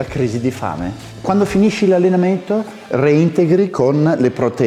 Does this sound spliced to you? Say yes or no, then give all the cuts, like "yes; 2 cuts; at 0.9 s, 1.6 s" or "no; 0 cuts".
yes; 1 cut; at 1.1 s